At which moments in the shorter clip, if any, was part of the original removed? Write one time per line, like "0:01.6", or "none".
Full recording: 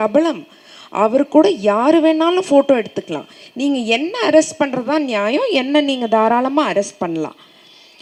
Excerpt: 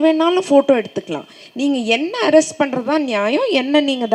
none